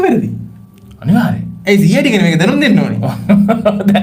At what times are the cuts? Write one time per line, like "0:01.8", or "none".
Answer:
none